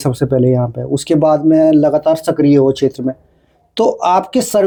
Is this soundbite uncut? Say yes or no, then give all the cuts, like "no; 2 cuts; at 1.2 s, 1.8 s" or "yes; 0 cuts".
yes; 0 cuts